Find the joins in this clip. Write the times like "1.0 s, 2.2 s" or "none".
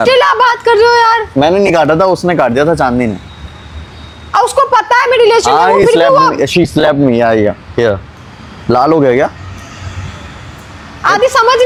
none